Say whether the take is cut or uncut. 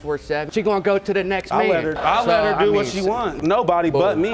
cut